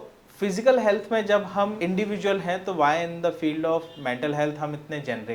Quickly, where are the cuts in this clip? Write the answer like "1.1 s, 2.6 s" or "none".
1.8 s